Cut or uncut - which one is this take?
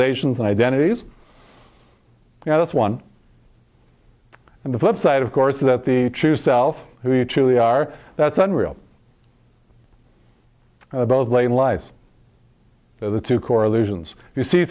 uncut